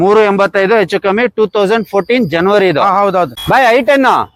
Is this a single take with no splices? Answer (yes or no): yes